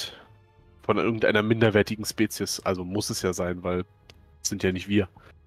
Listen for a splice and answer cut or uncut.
uncut